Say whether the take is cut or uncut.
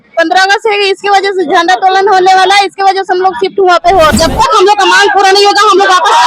cut